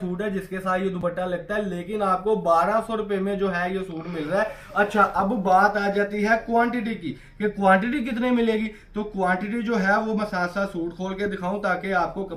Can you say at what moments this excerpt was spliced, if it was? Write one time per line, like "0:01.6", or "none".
none